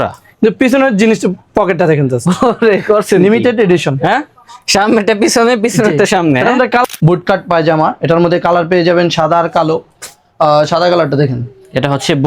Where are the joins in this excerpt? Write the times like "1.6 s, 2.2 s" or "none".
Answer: 6.8 s